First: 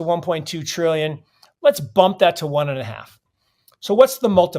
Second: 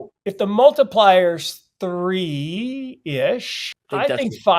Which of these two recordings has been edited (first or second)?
second